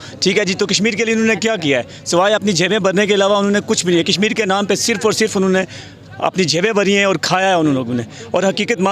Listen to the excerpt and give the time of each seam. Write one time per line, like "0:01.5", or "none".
none

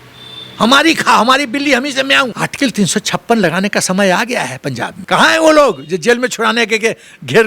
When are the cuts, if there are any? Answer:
0:02.3
0:04.9

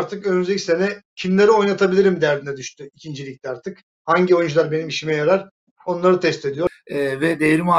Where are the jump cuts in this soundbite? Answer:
0:06.7

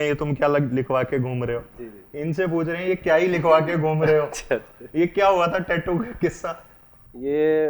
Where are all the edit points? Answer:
none

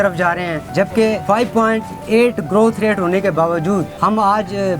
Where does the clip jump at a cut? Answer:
0:01.0
0:03.9

